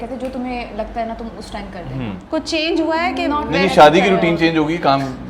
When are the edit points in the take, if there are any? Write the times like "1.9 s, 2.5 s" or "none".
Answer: 2.2 s